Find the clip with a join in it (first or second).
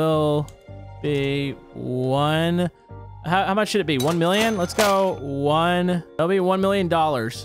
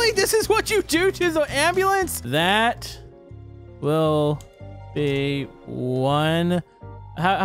second